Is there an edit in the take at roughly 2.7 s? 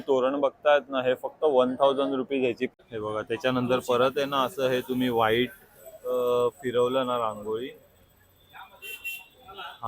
yes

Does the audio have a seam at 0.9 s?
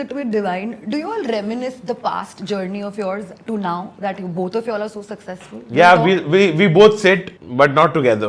no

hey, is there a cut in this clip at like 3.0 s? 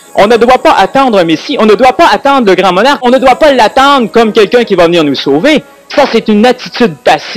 yes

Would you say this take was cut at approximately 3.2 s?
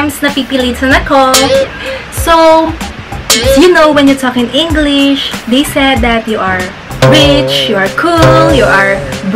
yes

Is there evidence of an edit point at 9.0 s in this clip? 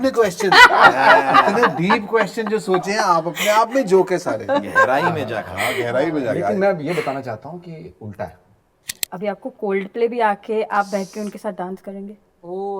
yes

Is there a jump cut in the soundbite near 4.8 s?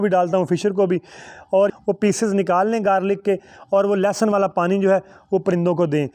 no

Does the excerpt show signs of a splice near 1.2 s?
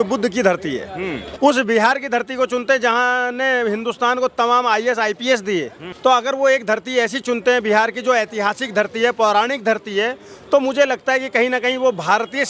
yes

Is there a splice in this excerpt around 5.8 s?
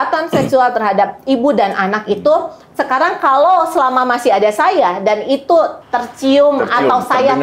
yes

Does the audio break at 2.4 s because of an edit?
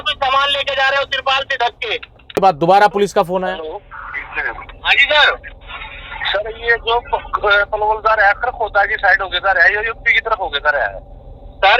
yes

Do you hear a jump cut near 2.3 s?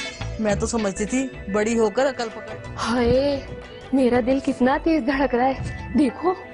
yes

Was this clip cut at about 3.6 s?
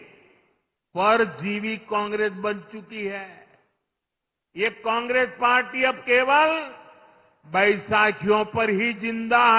no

